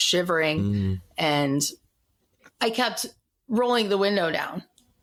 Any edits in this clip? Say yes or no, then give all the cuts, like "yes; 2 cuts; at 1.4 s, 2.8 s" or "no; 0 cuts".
no; 0 cuts